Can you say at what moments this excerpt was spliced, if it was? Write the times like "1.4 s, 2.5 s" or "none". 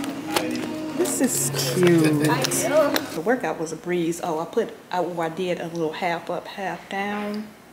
3.2 s